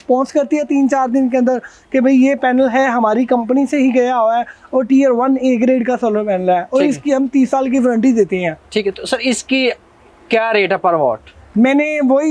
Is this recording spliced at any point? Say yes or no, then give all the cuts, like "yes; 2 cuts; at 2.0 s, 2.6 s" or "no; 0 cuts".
no; 0 cuts